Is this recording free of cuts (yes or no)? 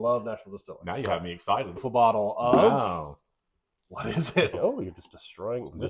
no